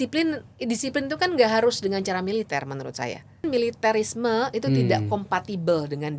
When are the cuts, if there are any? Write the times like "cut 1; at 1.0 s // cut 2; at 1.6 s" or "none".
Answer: cut 1; at 3.4 s